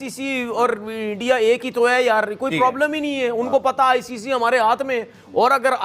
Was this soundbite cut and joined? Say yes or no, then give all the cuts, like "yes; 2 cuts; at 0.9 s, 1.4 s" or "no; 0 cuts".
no; 0 cuts